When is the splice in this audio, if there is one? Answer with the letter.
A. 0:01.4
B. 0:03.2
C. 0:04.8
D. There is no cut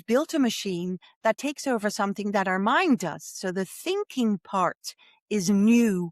A